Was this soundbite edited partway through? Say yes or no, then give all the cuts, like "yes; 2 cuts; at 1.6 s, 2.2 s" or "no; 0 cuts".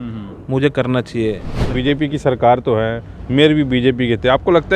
yes; 1 cut; at 1.6 s